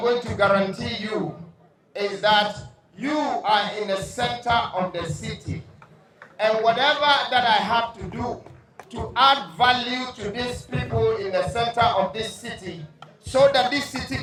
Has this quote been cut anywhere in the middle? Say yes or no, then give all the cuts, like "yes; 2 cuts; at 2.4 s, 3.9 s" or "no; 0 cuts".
no; 0 cuts